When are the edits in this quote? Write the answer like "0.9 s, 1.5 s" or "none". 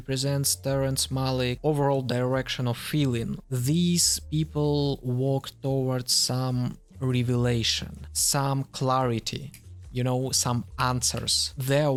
none